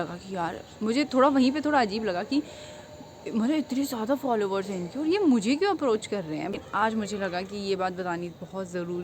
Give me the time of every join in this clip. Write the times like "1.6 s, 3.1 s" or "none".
6.5 s